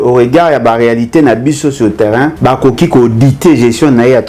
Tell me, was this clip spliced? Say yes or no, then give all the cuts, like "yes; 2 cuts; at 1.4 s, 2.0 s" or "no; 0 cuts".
yes; 1 cut; at 2.3 s